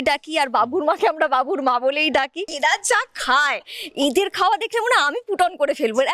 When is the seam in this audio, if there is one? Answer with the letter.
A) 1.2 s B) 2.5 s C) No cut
B